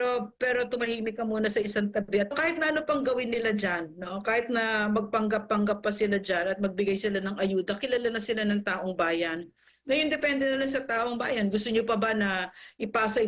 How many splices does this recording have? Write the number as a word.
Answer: one